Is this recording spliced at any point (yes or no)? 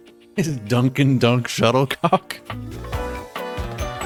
no